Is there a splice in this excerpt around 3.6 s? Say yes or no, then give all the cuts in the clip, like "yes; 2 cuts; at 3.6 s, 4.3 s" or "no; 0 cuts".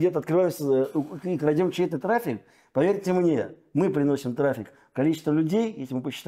no; 0 cuts